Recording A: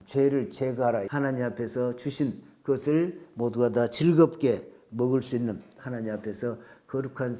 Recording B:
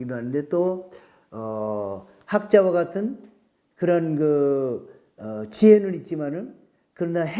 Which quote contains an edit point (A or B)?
A